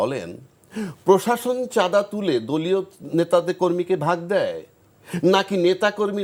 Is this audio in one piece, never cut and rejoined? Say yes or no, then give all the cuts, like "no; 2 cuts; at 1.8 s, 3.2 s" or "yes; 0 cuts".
yes; 0 cuts